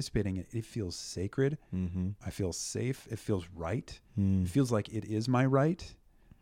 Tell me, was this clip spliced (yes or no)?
no